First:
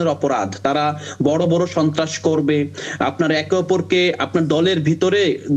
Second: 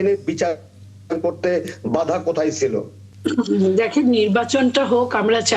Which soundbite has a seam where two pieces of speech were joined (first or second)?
second